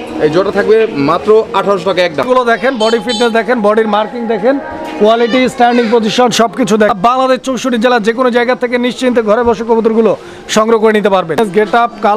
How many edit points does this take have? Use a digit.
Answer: 3